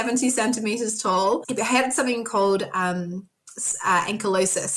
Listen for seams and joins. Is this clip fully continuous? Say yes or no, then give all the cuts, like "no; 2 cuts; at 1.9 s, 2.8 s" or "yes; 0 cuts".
yes; 0 cuts